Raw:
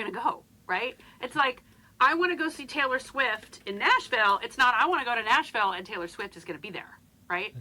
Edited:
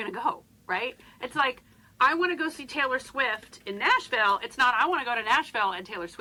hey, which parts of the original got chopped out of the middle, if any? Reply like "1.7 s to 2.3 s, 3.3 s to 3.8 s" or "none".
none

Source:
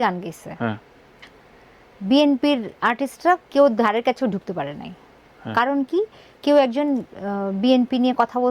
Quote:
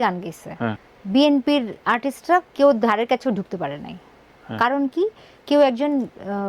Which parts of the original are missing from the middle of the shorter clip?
0.9 s to 1.9 s

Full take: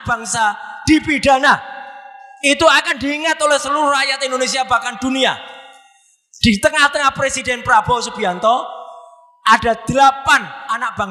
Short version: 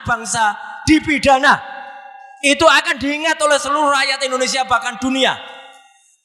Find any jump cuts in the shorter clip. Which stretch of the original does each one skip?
none

